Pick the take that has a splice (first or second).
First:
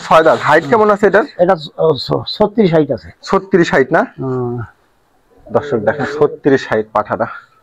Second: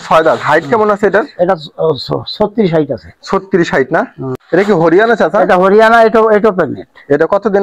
second